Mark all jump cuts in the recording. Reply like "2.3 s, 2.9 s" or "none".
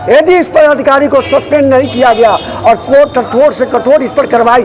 none